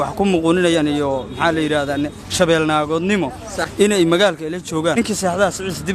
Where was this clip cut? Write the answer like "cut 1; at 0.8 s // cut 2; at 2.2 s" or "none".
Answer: cut 1; at 5.0 s